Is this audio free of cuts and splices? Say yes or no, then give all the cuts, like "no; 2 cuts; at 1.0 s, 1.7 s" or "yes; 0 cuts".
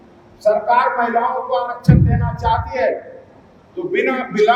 yes; 0 cuts